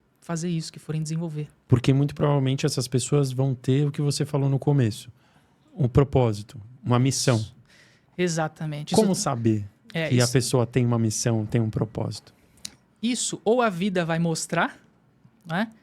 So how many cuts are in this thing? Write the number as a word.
zero